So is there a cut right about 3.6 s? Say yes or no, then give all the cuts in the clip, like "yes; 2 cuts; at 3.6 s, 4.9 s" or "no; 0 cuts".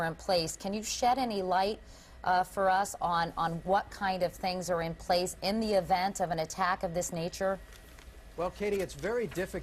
yes; 1 cut; at 3.6 s